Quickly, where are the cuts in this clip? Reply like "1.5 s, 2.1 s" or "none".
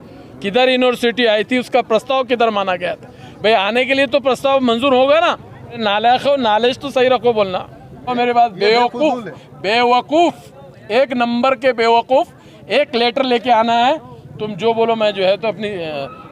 5.8 s, 8.1 s

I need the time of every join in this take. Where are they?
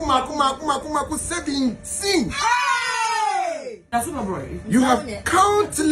3.9 s

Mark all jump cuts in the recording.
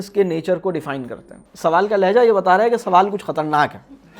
1.4 s

